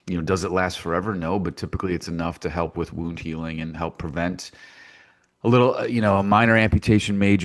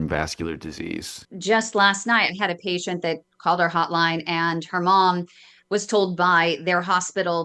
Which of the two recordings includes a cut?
second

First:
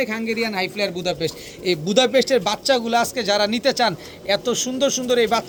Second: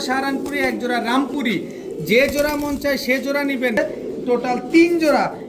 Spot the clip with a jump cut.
second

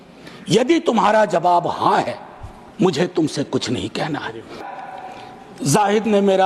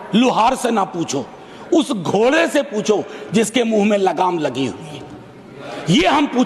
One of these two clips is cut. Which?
first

